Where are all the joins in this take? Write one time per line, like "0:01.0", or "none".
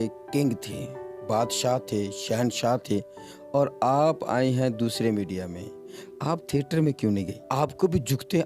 0:07.5